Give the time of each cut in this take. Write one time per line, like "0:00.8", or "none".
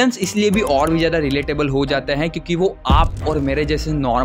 none